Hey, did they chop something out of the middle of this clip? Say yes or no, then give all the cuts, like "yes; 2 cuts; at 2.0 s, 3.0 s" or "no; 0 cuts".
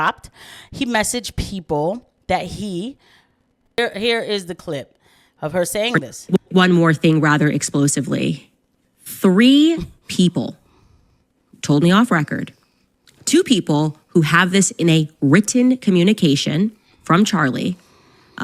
yes; 1 cut; at 3.8 s